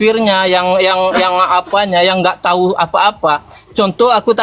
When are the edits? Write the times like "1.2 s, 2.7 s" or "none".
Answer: none